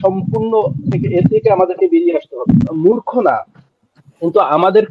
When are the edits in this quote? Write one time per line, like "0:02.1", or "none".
0:02.7